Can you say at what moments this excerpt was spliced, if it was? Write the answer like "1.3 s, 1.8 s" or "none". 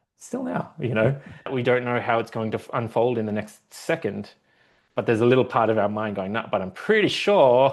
1.5 s